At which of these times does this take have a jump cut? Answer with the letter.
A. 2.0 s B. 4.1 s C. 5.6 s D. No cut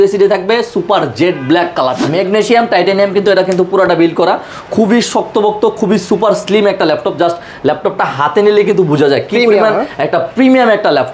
A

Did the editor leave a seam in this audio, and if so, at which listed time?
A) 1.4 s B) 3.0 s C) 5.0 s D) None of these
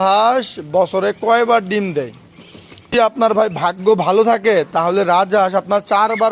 B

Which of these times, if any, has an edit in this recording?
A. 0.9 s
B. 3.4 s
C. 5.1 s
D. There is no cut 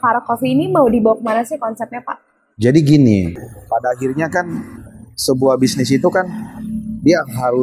B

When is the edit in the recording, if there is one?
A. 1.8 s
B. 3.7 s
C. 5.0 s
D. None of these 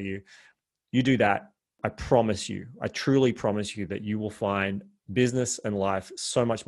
A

